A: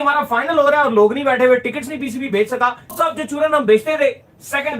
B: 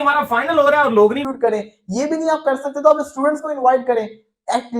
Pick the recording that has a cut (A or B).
A